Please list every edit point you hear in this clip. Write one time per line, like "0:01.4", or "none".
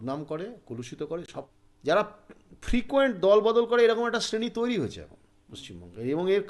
0:01.3